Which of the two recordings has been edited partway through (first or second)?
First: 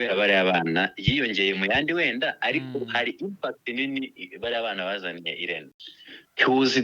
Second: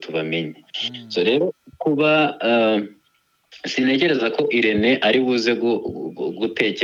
first